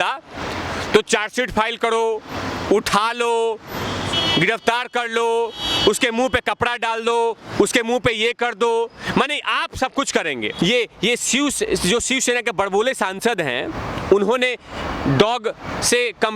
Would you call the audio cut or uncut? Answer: cut